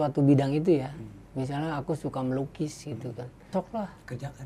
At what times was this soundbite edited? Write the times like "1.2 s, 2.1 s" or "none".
3.5 s